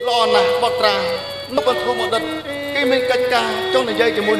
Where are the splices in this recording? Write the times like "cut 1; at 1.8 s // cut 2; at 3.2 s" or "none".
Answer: cut 1; at 1.6 s